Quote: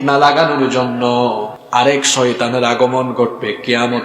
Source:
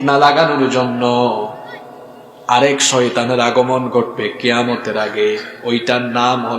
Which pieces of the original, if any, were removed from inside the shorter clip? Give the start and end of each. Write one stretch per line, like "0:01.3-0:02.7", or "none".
0:01.5-0:02.3

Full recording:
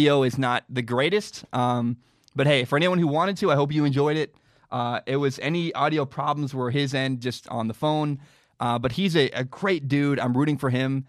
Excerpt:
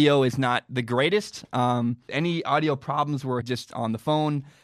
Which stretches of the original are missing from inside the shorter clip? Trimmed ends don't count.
0:02.1-0:05.4
0:06.7-0:07.2

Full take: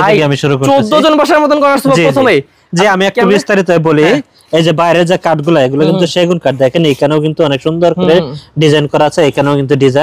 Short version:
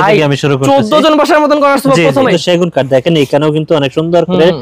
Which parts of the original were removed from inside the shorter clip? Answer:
0:02.3-0:06.0

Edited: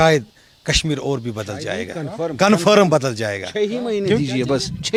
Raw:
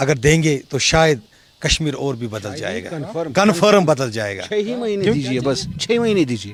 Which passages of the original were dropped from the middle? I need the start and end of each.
none

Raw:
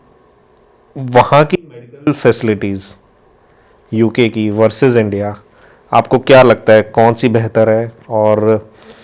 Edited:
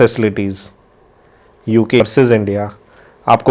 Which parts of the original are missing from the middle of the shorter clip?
0:04.2-0:04.6

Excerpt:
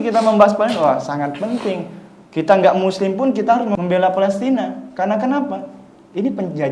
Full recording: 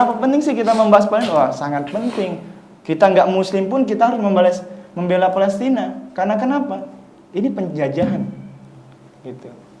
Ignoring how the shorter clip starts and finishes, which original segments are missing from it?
0:04.3-0:04.9

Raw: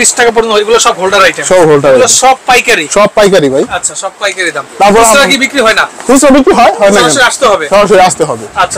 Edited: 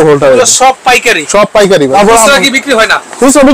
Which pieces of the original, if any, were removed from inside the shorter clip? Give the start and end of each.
0:03.5-0:04.8

